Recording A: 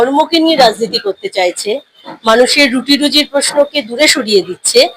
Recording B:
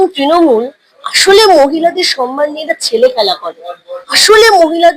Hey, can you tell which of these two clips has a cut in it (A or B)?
A